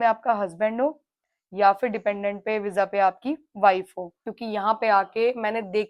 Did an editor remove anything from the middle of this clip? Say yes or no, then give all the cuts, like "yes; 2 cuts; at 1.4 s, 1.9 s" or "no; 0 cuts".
yes; 1 cut; at 4.3 s